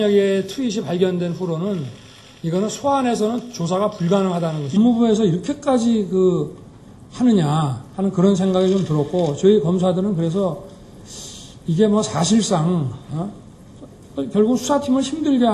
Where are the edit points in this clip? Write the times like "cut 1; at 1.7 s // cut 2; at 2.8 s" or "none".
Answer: none